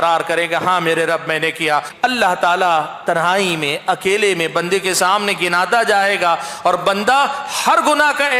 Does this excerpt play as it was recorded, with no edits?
no; 1 cut; at 1.9 s

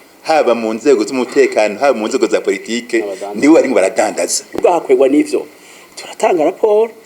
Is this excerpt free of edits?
no; 1 cut; at 4.6 s

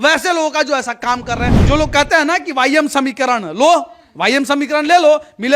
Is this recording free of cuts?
no; 1 cut; at 1.6 s

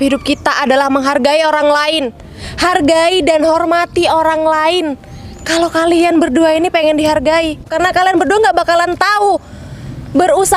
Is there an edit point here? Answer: yes; 1 cut; at 7.7 s

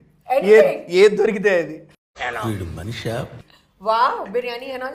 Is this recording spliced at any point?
no; 0 cuts

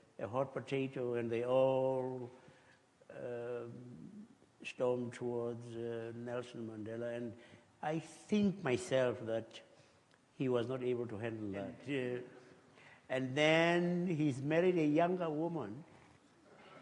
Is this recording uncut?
no; 1 cut; at 11.8 s

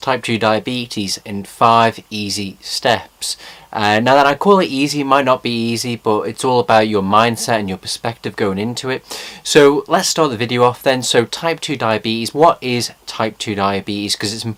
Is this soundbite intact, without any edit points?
yes; 0 cuts

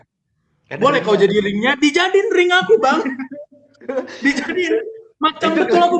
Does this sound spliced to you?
no; 0 cuts

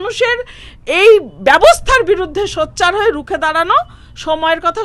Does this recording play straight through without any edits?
yes; 0 cuts

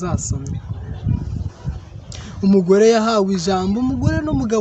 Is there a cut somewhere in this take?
no; 0 cuts

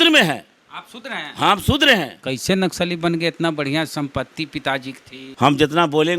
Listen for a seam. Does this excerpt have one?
yes; 2 cuts; at 2.2 s, 5.2 s

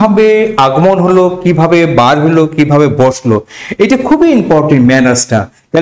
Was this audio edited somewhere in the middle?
no; 0 cuts

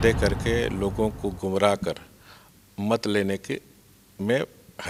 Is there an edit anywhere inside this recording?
no; 0 cuts

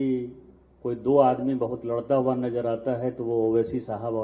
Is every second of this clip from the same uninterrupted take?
yes; 0 cuts

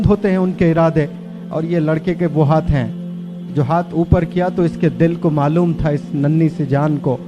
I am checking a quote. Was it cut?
no; 0 cuts

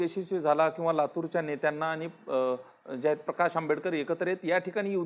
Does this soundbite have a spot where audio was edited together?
no; 0 cuts

